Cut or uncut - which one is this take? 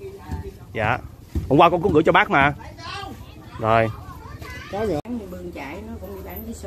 cut